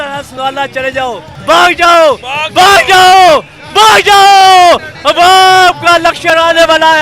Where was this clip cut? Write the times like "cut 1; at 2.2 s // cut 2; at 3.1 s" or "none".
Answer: cut 1; at 1.3 s